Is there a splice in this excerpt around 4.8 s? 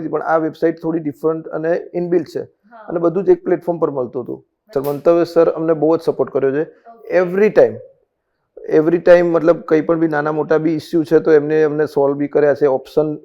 yes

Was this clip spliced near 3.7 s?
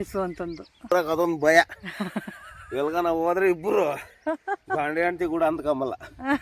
no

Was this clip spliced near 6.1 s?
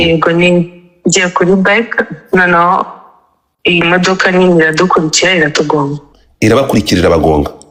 no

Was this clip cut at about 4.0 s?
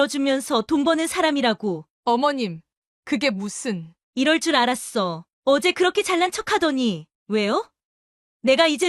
no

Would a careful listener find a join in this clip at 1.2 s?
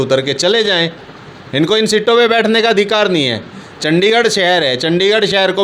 no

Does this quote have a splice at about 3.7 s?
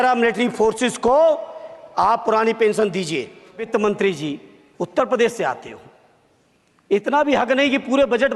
yes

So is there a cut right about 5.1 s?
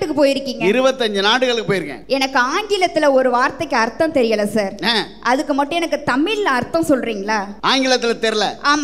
no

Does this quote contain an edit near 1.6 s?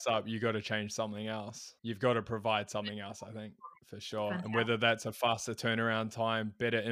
yes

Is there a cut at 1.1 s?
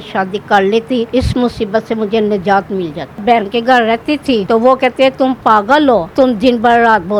yes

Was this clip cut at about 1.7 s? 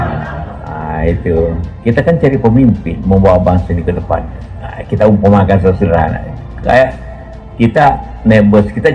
yes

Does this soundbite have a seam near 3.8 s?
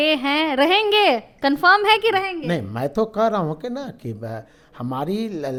no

